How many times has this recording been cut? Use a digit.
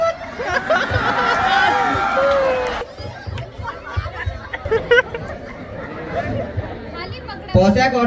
1